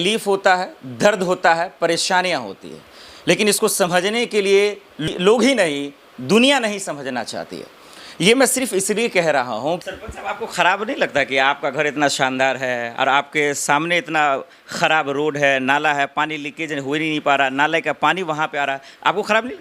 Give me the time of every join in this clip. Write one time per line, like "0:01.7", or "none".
0:05.1
0:09.8